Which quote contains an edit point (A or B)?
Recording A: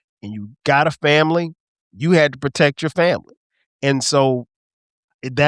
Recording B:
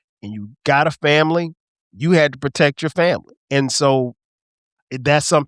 B